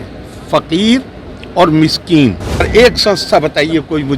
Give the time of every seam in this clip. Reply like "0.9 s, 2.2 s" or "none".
2.7 s